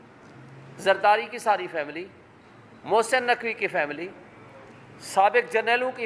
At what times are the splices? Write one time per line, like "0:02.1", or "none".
none